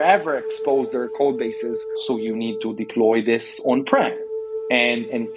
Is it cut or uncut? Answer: cut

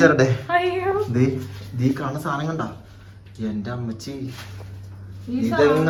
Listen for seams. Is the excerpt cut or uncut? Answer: uncut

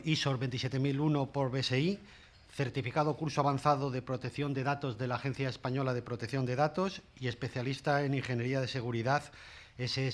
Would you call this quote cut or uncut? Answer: cut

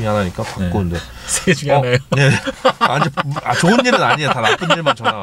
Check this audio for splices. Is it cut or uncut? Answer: uncut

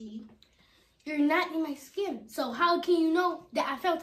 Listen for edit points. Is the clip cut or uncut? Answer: uncut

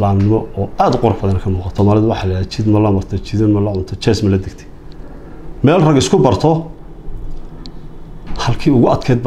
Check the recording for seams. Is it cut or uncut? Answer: cut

